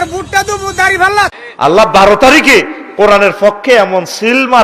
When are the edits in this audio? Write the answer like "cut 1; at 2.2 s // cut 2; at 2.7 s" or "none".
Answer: cut 1; at 1.4 s

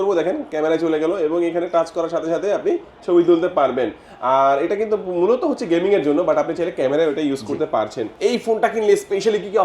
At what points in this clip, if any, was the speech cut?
cut 1; at 8.0 s

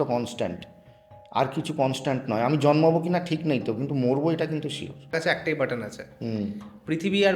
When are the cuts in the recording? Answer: cut 1; at 5.1 s

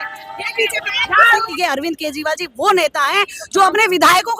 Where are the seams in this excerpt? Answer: cut 1; at 1.5 s

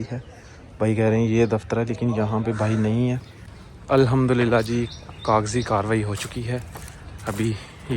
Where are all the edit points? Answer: cut 1; at 3.3 s

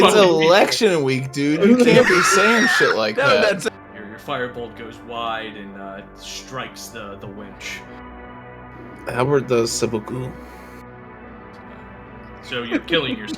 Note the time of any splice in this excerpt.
cut 1; at 3.7 s

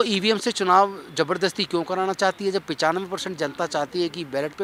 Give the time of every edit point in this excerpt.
none

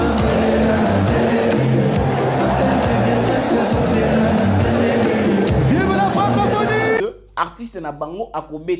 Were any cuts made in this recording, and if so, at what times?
cut 1; at 7.0 s

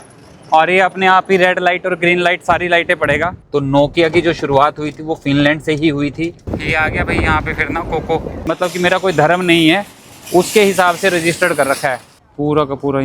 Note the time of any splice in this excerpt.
cut 1; at 3.4 s // cut 2; at 6.4 s // cut 3; at 8.4 s // cut 4; at 12.1 s

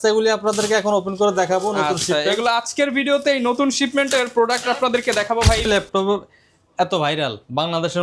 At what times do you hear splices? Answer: cut 1; at 5.7 s

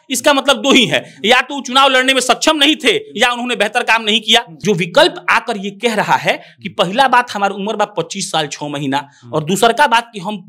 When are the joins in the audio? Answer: cut 1; at 4.5 s

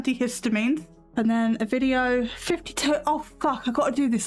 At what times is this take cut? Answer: cut 1; at 1.0 s

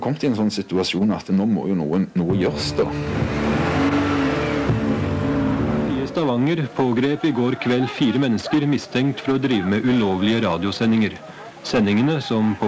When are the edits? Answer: cut 1; at 6.0 s

